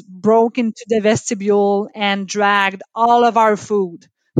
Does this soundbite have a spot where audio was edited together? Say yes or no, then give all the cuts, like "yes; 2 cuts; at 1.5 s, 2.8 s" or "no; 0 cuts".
no; 0 cuts